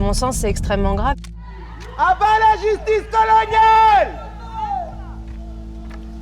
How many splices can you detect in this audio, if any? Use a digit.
1